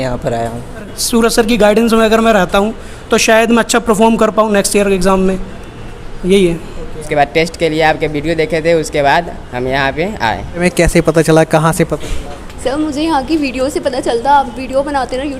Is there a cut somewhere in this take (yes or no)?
yes